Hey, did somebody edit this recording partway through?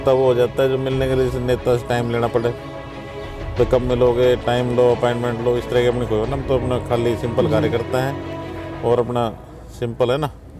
no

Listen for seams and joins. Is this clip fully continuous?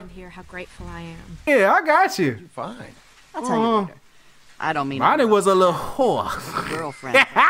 no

